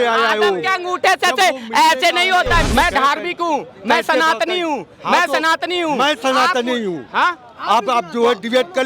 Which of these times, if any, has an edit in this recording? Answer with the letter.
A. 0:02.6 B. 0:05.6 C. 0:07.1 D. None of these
A